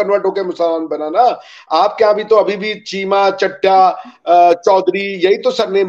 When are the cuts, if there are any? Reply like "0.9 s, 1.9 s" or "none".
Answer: none